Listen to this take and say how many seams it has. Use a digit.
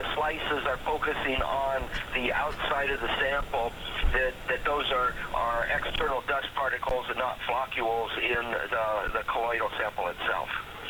0